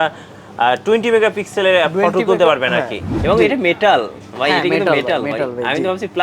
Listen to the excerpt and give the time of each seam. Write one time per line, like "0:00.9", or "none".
0:03.0